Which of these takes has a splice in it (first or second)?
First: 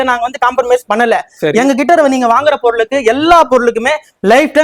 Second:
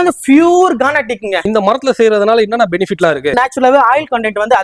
second